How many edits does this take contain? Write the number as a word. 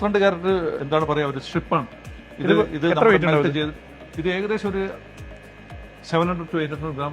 zero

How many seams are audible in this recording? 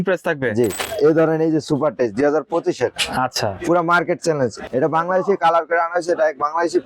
two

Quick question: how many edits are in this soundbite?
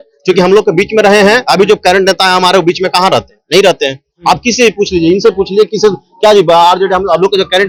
zero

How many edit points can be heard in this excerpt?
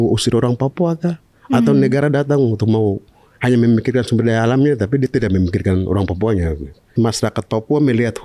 one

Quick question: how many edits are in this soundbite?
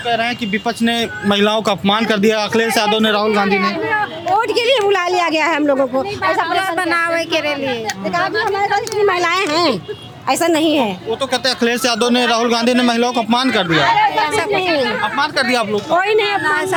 zero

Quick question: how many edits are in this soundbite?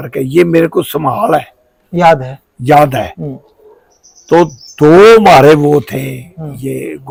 zero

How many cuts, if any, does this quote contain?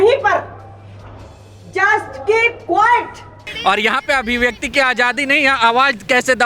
one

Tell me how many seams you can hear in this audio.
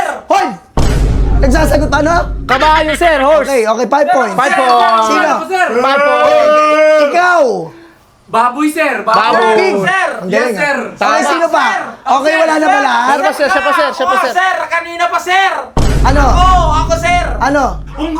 zero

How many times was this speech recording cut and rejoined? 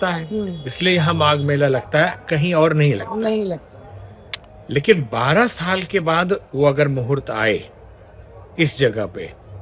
zero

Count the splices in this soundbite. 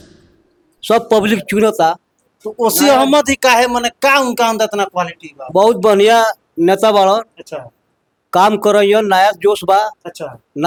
zero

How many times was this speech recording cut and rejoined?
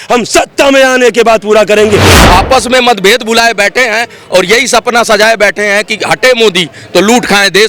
one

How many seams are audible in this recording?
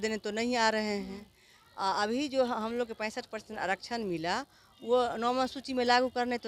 zero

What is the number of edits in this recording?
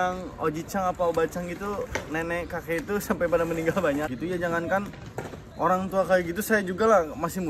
one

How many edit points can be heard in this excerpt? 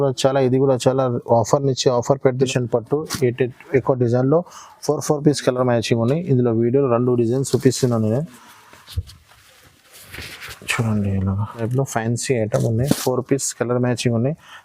two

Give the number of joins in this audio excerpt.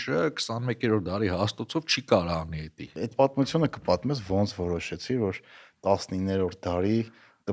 one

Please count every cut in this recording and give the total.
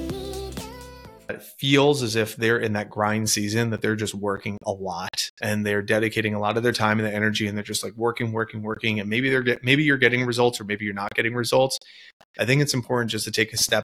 one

